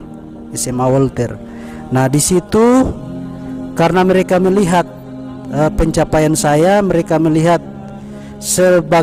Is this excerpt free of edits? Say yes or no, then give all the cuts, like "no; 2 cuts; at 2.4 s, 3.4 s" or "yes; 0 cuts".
yes; 0 cuts